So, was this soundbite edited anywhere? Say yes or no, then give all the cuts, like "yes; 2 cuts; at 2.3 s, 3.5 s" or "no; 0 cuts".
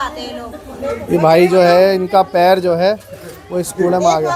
no; 0 cuts